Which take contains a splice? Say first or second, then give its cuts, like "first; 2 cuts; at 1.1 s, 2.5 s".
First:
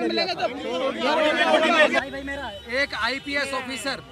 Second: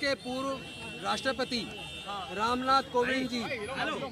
first; 1 cut; at 2.0 s